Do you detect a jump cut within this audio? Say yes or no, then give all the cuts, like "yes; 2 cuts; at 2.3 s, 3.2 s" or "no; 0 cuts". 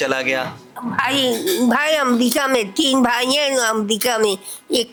no; 0 cuts